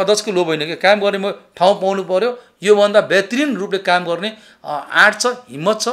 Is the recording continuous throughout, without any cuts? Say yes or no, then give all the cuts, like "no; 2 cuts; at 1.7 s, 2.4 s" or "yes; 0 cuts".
yes; 0 cuts